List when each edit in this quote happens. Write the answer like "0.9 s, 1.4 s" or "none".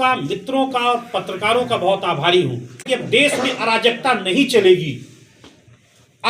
2.8 s